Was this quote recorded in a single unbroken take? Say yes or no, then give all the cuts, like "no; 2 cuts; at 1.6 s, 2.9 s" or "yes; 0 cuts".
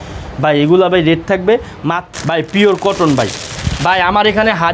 no; 1 cut; at 2.0 s